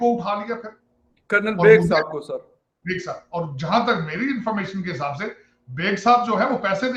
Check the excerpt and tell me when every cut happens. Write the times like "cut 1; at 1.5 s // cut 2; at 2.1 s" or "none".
none